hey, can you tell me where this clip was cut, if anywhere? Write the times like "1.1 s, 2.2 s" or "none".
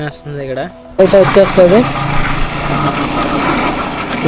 1.0 s